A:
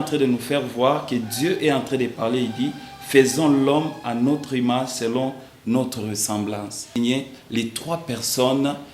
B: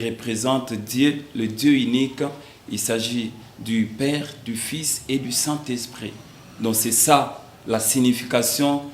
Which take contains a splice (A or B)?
A